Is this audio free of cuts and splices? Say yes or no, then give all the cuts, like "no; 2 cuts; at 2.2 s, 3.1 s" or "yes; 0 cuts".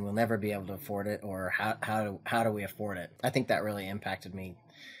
no; 1 cut; at 3.1 s